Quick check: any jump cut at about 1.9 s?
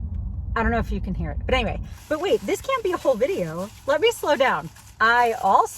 yes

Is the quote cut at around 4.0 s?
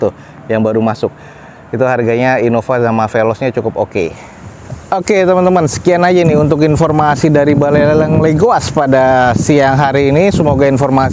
no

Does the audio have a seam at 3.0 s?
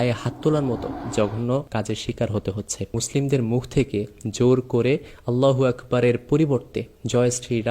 yes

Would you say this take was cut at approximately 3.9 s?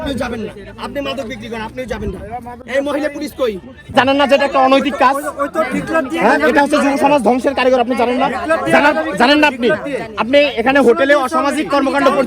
yes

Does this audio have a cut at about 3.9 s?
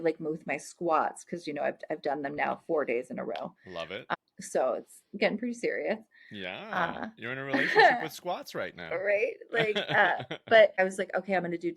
yes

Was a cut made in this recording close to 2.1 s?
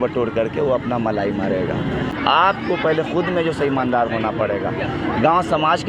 yes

